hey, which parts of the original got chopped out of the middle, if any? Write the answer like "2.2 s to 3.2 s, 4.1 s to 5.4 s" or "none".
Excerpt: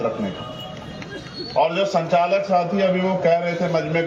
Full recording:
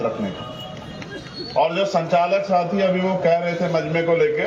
none